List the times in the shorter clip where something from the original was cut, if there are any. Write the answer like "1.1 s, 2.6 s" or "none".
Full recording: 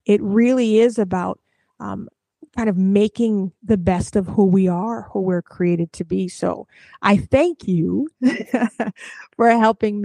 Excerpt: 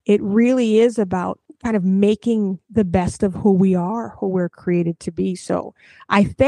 1.4 s